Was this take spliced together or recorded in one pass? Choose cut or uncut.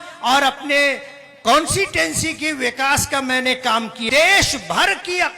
cut